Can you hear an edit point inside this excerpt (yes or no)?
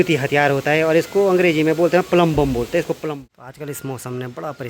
yes